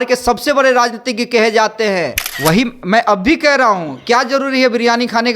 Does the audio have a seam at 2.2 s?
yes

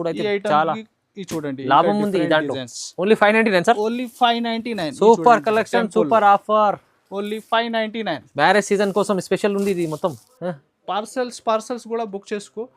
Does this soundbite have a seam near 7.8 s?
no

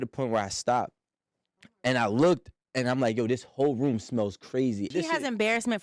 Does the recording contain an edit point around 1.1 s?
no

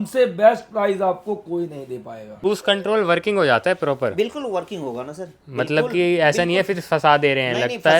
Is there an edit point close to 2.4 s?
yes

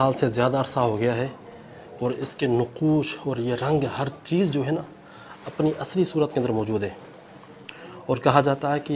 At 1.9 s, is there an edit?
no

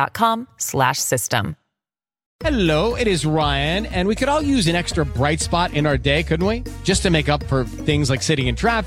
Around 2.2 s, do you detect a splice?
yes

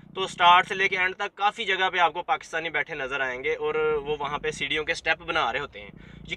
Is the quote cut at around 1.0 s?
no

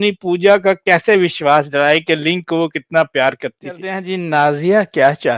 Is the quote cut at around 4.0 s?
yes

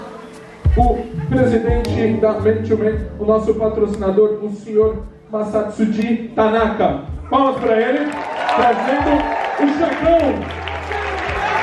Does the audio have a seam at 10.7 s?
no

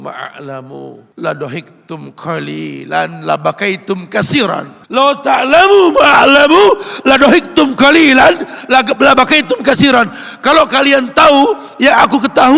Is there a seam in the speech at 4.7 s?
yes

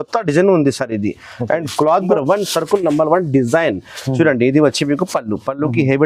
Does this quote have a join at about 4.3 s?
no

